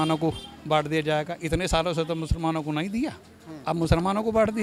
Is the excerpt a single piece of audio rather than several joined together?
yes; 0 cuts

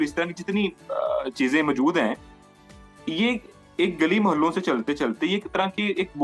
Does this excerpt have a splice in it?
no; 0 cuts

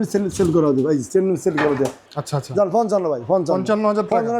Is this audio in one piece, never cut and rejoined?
no; 1 cut; at 2.0 s

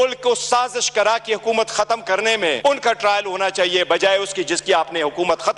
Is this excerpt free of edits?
yes; 0 cuts

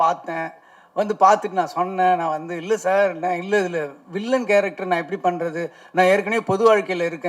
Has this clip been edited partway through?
no; 0 cuts

